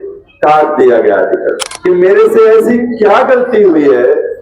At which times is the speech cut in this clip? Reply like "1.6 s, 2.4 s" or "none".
1.7 s